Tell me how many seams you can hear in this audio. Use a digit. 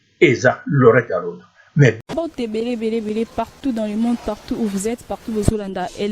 1